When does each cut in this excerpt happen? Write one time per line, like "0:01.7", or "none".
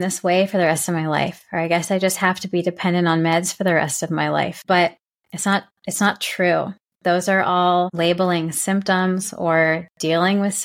0:04.6
0:07.9